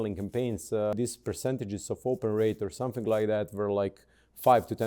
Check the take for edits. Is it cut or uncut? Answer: cut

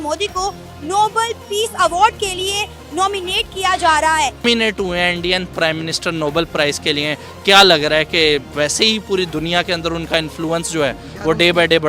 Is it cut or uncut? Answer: cut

